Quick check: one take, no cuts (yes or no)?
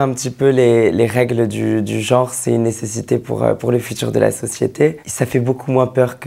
yes